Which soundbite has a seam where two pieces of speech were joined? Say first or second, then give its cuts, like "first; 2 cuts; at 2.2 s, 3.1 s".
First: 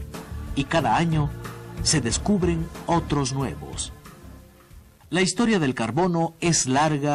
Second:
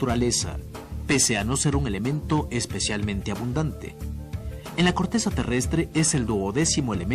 second; 1 cut; at 1.0 s